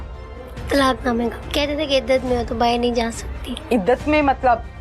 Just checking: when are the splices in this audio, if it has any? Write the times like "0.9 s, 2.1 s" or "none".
1.4 s